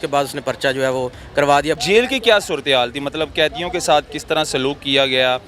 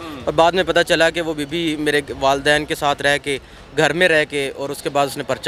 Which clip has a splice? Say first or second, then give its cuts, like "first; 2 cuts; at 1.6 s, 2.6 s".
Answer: first; 1 cut; at 1.8 s